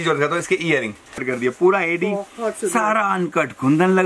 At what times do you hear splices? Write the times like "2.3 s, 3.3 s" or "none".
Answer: 1.2 s